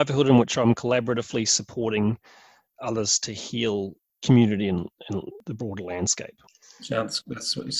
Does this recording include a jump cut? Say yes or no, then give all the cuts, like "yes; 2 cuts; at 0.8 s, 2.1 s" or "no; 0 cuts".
no; 0 cuts